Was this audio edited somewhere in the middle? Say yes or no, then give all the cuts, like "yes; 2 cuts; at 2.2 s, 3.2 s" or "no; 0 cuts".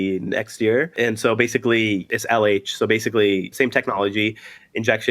yes; 3 cuts; at 0.9 s, 2.1 s, 3.5 s